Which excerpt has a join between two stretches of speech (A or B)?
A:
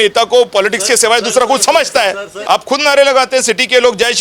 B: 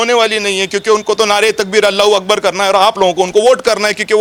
A